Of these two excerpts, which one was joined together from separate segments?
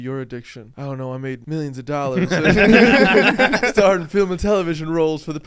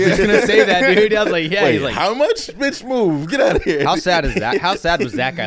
first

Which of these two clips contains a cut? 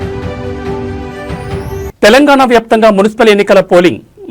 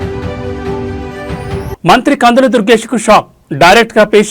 second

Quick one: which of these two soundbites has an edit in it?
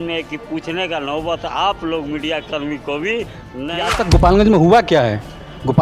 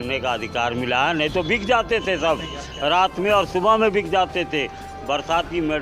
first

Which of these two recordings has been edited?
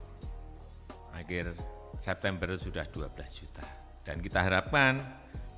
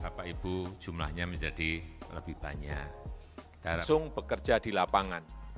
second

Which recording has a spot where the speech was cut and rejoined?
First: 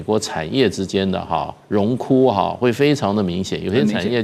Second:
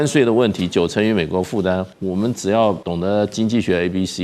second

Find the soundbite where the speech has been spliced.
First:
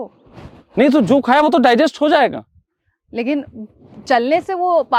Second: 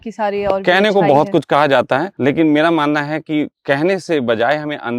second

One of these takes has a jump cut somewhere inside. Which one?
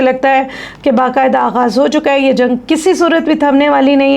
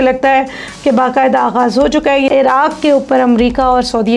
second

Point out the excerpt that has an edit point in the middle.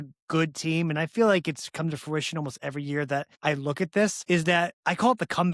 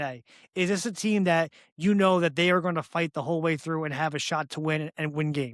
first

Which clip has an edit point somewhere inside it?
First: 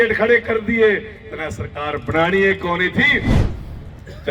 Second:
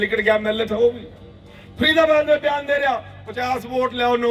first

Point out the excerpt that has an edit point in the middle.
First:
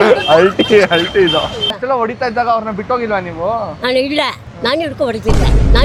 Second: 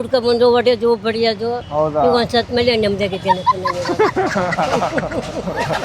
second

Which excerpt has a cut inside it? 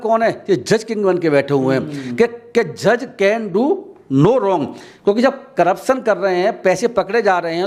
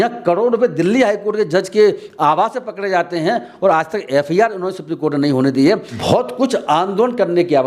second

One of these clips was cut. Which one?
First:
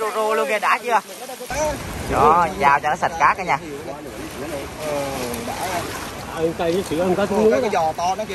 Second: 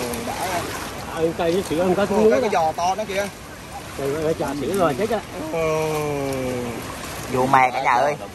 first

